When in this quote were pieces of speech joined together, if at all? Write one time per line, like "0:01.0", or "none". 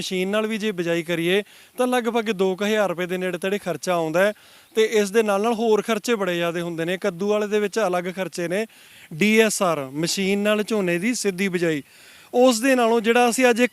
0:08.9